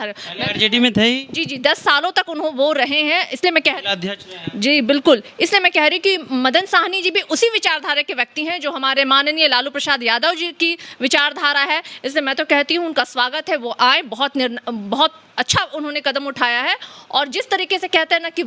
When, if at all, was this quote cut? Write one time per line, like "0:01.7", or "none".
none